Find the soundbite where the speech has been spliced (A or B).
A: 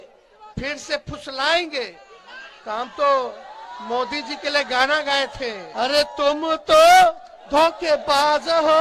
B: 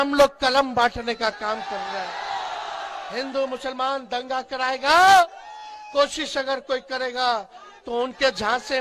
A